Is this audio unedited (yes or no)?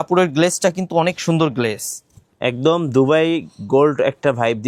yes